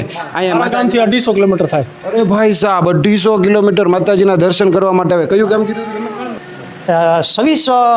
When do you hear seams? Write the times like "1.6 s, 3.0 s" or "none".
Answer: 6.3 s